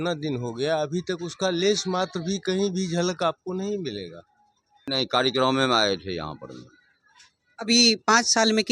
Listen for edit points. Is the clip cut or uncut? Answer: cut